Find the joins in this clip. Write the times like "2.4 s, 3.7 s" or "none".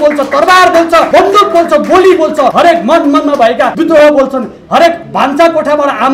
1.1 s, 2.5 s, 3.7 s